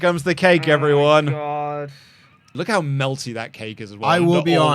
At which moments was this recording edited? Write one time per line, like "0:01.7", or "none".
0:02.5